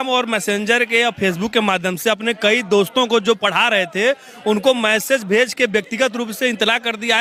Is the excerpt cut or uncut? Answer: uncut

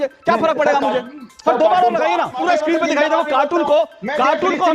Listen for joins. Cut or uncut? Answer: cut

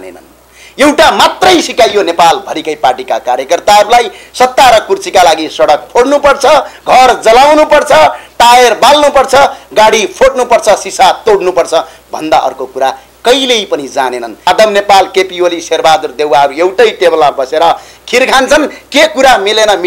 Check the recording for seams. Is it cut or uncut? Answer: cut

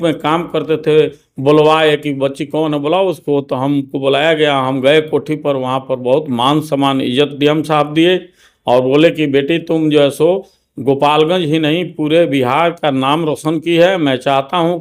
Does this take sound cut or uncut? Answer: uncut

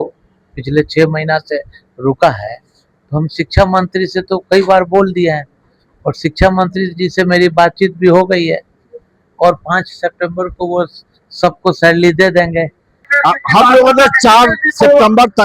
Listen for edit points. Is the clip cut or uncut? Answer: cut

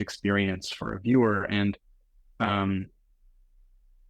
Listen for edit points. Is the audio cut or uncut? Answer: uncut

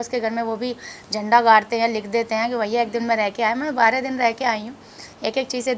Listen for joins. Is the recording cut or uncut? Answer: uncut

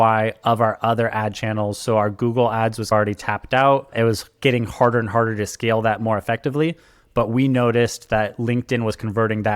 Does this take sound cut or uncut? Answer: uncut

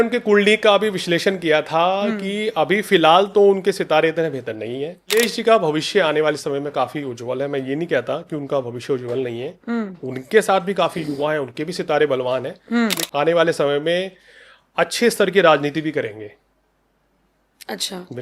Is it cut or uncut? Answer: cut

